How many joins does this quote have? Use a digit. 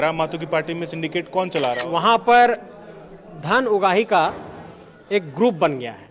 1